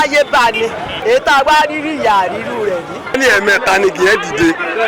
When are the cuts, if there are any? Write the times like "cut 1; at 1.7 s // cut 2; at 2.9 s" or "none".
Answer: cut 1; at 0.9 s // cut 2; at 3.2 s